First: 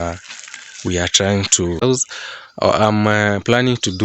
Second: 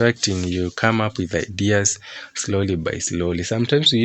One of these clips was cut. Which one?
first; 1 cut; at 1.8 s

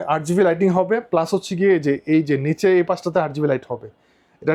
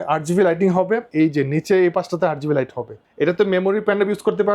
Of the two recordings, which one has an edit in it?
second; 2 cuts; at 1.1 s, 3.0 s

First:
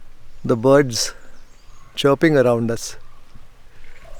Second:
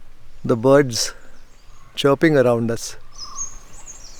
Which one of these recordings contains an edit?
second; 1 cut; at 3.1 s

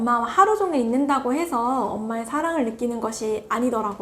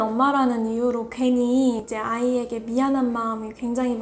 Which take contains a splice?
second; 1 cut; at 1.9 s

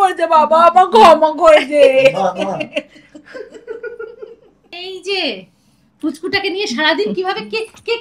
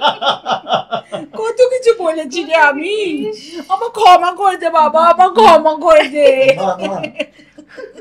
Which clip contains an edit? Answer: first; 1 cut; at 4.8 s

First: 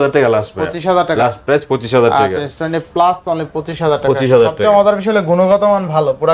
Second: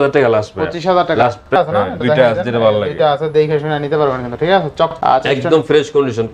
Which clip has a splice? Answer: second; 2 cuts; at 1.5 s, 4.9 s

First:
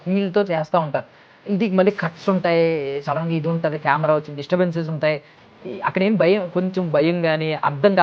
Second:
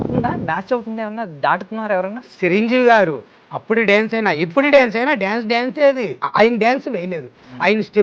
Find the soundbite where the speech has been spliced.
second; 2 cuts; at 2.2 s, 6.2 s

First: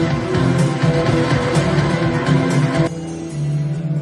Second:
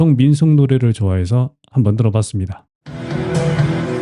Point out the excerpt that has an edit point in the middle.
first; 1 cut; at 2.9 s

